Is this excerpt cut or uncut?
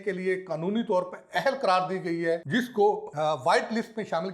cut